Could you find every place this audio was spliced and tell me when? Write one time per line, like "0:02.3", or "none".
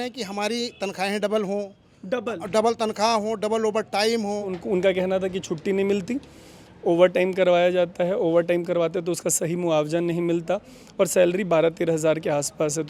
0:04.5